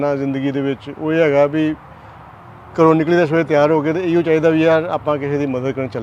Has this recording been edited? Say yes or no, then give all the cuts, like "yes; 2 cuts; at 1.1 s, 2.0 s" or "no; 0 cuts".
no; 0 cuts